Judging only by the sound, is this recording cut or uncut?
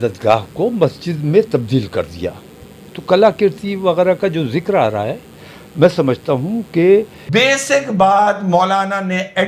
cut